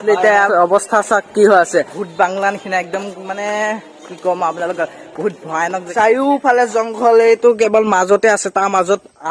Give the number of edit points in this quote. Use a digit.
2